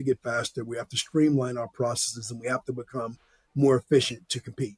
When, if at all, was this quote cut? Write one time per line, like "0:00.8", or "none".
none